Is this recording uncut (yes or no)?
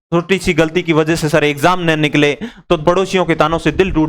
no